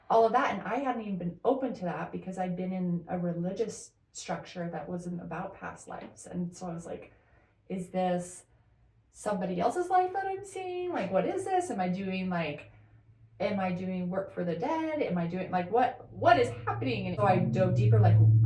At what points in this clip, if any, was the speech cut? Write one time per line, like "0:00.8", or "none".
0:17.1